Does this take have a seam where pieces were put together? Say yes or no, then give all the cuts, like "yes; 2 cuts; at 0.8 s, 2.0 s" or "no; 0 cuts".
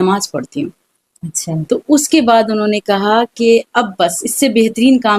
no; 0 cuts